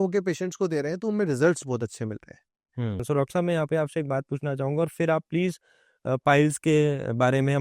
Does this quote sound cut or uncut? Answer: cut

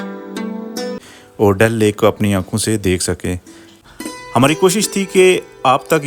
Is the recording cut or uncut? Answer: cut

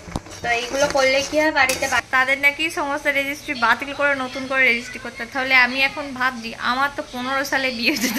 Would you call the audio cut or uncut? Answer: cut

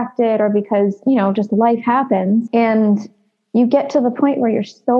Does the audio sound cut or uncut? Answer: cut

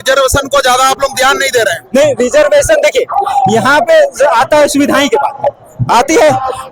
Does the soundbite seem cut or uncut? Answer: uncut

